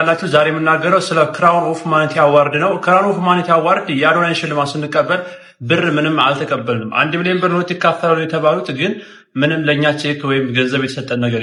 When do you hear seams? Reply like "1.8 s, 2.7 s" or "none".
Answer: none